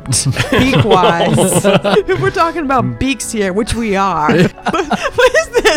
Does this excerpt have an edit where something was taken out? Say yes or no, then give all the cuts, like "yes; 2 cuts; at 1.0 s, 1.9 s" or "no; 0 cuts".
yes; 2 cuts; at 2.0 s, 4.5 s